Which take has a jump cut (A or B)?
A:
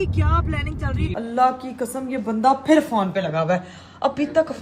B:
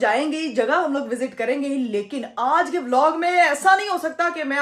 A